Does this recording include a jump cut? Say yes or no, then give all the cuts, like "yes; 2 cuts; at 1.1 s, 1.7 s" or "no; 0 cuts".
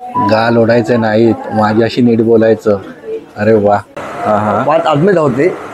yes; 1 cut; at 4.1 s